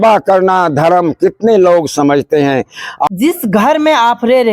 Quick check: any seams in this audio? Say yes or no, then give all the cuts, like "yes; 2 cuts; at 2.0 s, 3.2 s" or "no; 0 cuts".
yes; 1 cut; at 3.1 s